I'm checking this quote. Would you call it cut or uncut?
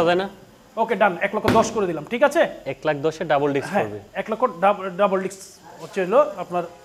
uncut